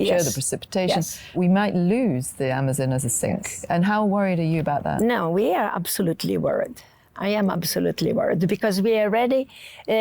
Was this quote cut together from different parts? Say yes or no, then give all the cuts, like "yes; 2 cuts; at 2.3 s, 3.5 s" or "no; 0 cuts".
yes; 1 cut; at 1.4 s